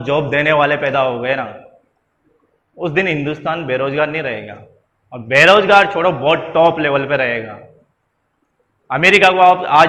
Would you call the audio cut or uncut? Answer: uncut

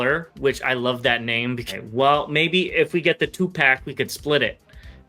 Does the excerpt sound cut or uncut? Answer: cut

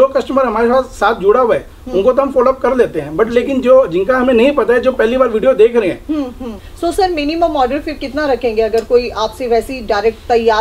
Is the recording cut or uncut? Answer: cut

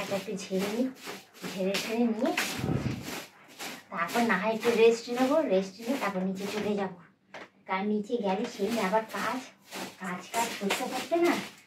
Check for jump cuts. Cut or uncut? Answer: uncut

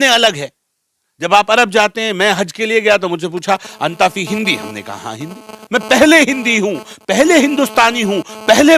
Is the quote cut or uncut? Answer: uncut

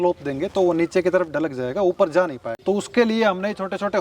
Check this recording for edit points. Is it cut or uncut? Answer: cut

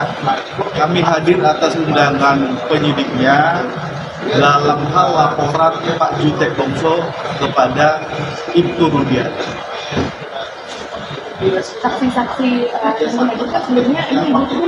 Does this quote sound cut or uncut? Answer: uncut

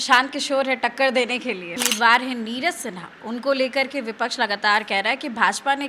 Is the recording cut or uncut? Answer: cut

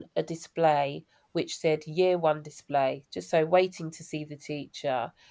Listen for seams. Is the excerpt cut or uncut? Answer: uncut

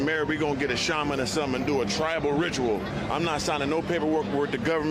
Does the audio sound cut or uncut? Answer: uncut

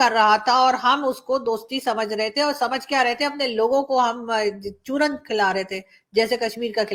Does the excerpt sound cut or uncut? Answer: uncut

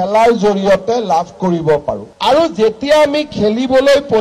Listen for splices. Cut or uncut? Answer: cut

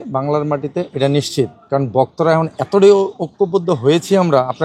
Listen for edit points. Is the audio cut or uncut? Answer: uncut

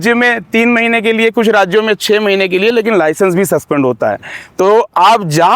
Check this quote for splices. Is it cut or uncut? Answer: uncut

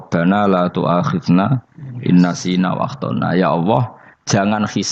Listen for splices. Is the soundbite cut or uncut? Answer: uncut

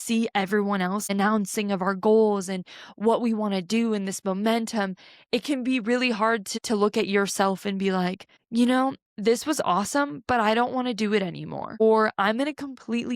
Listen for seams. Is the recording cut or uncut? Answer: cut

